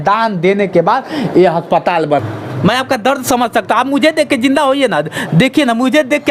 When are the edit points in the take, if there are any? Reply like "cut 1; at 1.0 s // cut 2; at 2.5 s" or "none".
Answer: cut 1; at 2.2 s